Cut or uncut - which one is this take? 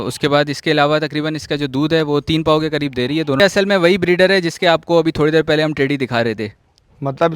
cut